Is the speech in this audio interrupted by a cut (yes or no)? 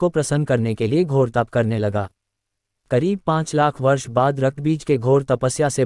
yes